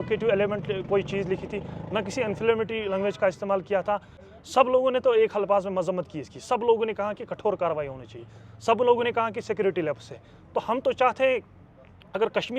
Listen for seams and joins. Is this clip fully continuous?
no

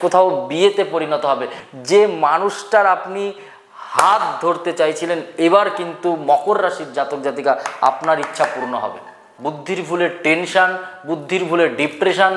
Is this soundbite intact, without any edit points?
no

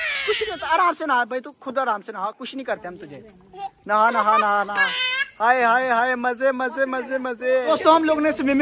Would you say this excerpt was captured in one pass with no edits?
yes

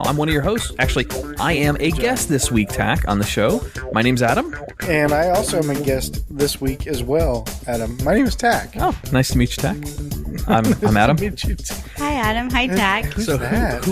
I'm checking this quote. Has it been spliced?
yes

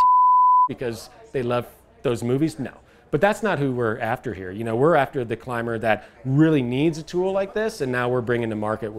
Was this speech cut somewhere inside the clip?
no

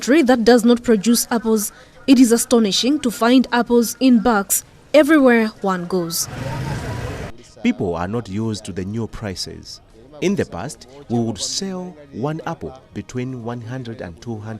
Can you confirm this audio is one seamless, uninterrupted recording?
no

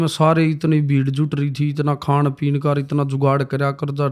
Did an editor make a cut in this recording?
no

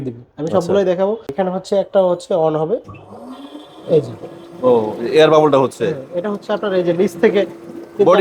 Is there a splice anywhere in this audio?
yes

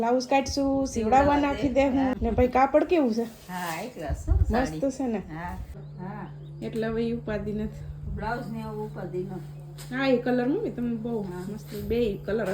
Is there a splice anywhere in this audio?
yes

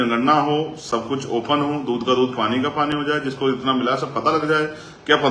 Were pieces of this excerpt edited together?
no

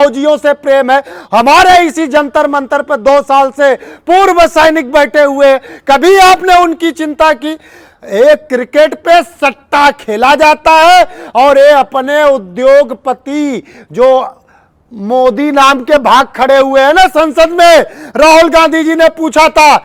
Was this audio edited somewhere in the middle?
no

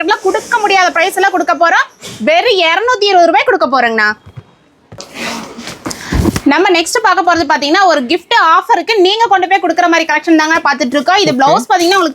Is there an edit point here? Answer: no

